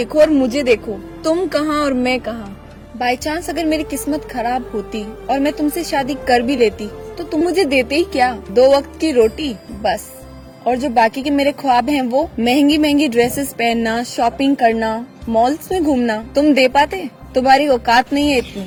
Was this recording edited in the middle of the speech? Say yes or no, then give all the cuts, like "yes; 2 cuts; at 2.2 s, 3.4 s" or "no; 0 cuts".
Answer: no; 0 cuts